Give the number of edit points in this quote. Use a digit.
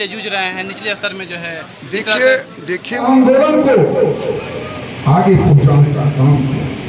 1